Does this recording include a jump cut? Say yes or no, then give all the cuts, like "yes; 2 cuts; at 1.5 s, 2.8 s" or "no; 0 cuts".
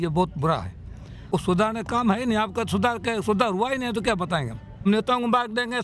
yes; 2 cuts; at 1.3 s, 4.8 s